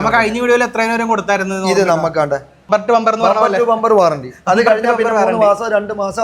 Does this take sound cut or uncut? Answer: cut